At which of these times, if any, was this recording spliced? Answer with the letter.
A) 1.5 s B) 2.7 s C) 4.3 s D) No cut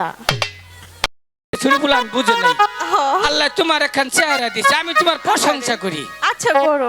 A